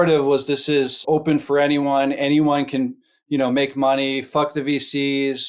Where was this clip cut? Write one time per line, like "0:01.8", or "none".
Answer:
0:01.0